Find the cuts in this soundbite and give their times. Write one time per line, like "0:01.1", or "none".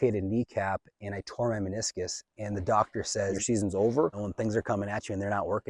0:03.4
0:04.2